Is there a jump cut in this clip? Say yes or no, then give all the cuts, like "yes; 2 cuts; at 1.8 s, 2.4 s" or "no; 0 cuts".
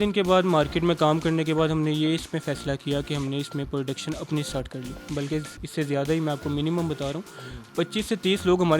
yes; 1 cut; at 4.9 s